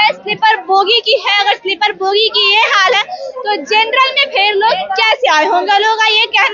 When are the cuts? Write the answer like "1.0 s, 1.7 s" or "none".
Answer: none